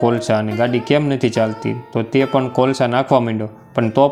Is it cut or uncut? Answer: uncut